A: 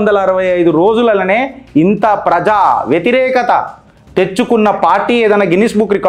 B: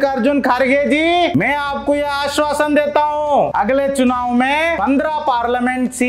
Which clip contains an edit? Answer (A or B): B